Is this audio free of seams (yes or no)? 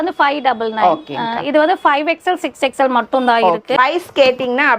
no